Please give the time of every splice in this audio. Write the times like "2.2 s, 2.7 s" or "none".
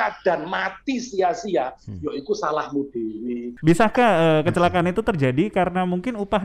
3.5 s